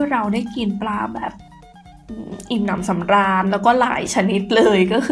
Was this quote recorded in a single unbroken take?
yes; 0 cuts

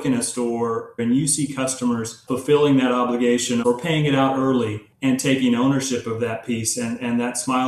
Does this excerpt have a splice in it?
yes; 4 cuts; at 1.0 s, 2.2 s, 3.6 s, 4.8 s

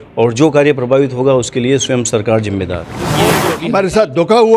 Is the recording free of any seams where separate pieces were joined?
no; 1 cut; at 3.4 s

